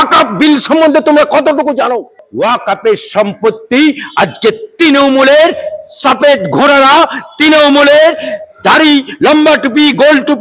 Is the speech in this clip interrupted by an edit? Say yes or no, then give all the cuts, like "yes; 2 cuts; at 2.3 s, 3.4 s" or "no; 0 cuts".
yes; 1 cut; at 2.2 s